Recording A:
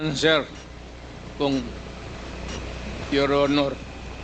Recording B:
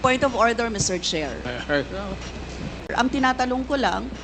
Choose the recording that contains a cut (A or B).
B